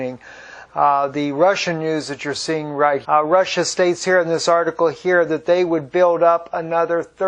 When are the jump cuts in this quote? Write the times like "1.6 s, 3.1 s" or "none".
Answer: none